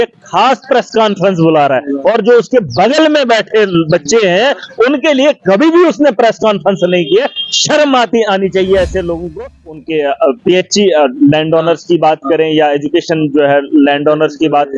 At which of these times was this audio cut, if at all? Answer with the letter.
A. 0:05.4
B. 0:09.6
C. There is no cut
B